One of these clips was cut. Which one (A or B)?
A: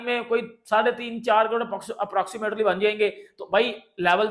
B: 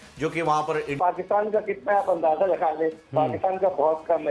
B